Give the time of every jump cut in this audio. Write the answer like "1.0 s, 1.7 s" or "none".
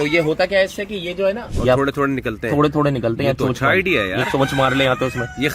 1.5 s